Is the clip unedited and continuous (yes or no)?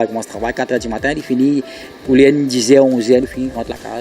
no